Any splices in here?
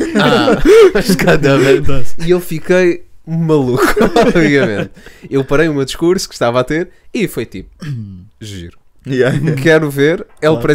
no; 0 cuts

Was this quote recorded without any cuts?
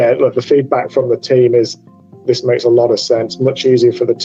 yes; 0 cuts

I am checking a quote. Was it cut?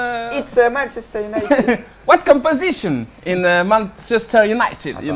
no; 0 cuts

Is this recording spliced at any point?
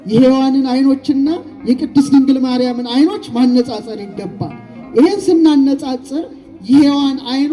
no; 0 cuts

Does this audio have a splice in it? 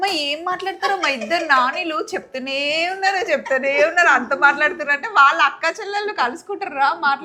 no; 0 cuts

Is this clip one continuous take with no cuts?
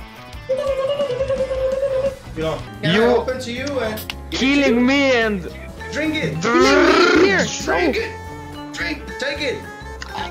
no; 1 cut; at 2.8 s

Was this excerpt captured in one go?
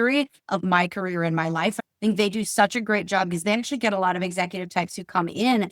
no; 1 cut; at 1.8 s

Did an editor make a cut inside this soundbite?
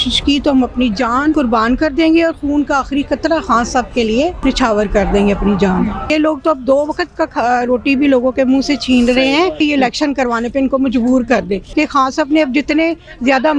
yes; 5 cuts; at 1.3 s, 4.4 s, 6.1 s, 9.6 s, 11.6 s

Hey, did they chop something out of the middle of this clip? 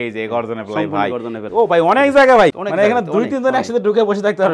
yes; 2 cuts; at 1.4 s, 2.6 s

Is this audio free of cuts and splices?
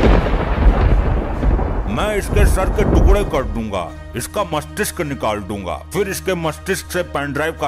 yes; 0 cuts

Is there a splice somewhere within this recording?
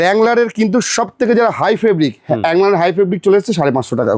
no; 0 cuts

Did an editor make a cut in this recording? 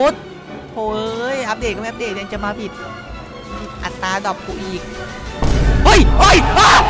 no; 0 cuts

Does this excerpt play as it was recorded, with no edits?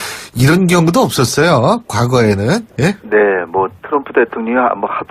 no; 1 cut; at 1.9 s

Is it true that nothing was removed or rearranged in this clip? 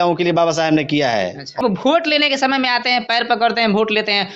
no; 1 cut; at 1.6 s

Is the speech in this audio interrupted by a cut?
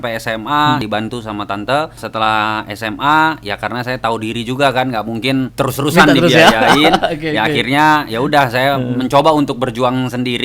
yes; 3 cuts; at 0.8 s, 2.0 s, 5.5 s

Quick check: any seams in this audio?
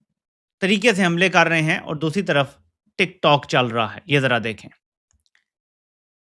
no; 0 cuts

